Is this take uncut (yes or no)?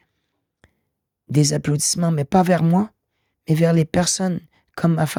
yes